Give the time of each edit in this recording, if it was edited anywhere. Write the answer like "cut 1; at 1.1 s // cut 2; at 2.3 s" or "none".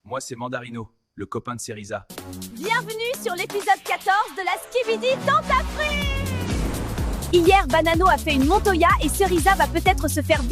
cut 1; at 2.0 s